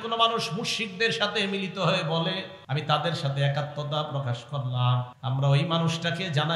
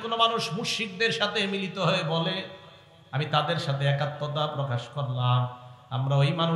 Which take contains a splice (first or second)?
first